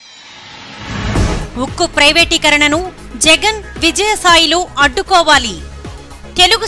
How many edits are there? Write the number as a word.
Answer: one